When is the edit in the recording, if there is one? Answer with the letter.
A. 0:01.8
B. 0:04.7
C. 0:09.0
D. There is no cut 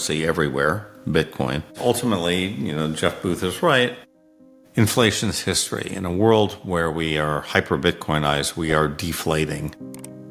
A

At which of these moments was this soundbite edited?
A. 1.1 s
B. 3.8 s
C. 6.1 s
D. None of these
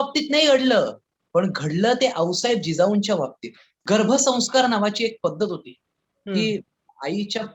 B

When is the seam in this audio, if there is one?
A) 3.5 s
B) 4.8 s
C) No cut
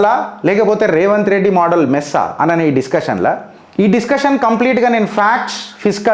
C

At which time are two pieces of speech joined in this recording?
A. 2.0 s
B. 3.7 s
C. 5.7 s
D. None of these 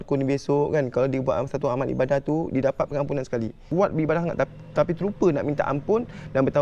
B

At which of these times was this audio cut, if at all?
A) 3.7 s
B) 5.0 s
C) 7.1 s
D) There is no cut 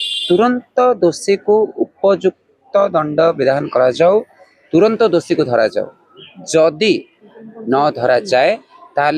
D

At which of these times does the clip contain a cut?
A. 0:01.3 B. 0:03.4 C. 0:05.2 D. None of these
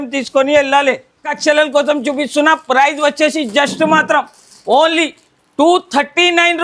A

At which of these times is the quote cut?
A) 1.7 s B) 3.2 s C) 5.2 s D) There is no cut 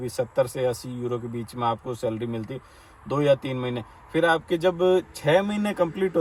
D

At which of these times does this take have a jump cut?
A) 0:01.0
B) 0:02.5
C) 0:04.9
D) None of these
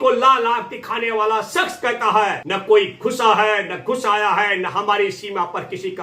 B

